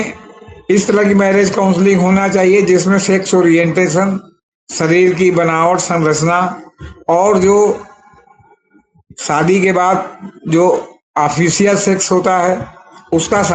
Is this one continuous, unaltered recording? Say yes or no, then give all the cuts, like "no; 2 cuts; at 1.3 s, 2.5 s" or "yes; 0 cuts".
yes; 0 cuts